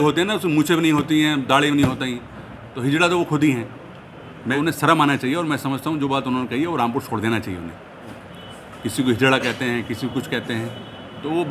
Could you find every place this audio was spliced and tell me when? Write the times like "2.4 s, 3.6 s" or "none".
4.5 s, 8.2 s